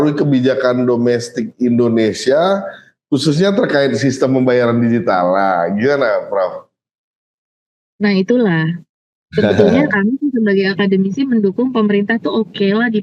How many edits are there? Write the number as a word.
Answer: zero